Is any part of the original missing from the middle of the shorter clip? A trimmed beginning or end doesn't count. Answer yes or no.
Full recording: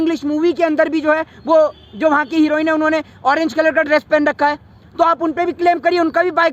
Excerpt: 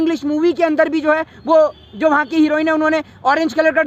no